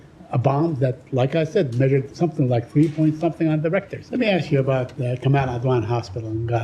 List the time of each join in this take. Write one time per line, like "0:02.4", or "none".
0:04.0